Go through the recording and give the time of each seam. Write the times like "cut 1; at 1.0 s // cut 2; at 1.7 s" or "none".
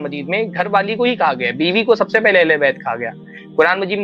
none